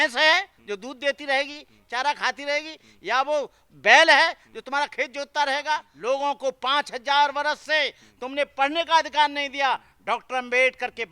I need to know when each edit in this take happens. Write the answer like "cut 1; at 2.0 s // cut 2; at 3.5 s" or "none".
cut 1; at 5.9 s